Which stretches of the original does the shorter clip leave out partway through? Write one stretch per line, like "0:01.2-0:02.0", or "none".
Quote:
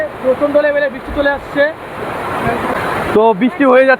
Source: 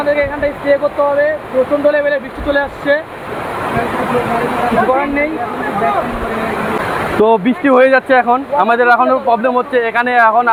0:04.1-0:06.8